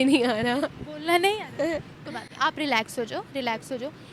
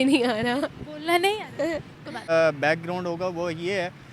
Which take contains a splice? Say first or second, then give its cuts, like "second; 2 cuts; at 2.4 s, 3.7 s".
second; 1 cut; at 2.3 s